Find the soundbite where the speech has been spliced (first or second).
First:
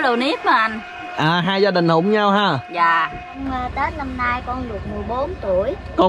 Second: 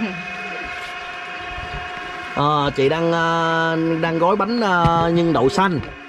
first